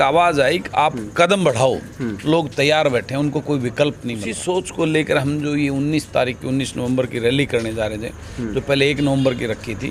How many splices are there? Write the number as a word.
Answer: one